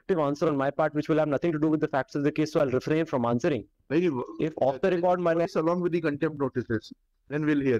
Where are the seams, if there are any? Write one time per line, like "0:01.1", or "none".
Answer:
0:05.5